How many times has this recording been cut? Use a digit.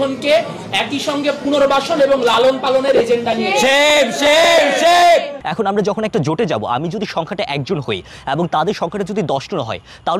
1